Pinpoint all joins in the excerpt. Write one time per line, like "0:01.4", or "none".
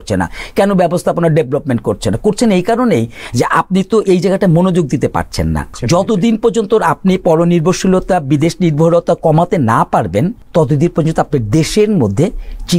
0:05.7
0:10.4